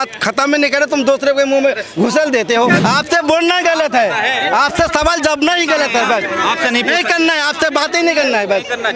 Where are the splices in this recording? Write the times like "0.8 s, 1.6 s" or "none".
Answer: 2.8 s

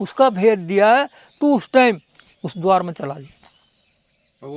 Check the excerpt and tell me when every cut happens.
none

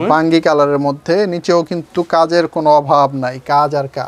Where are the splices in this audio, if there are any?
none

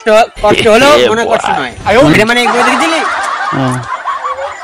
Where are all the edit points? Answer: 2.1 s

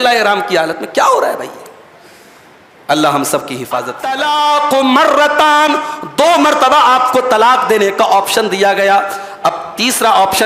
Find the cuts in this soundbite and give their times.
4.0 s

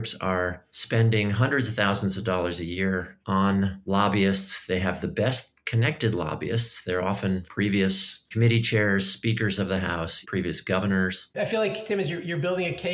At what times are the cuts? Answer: 7.5 s, 8.3 s, 10.2 s, 11.2 s

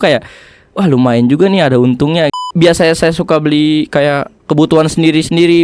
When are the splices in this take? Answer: 2.5 s

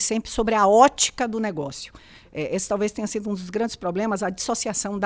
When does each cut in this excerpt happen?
none

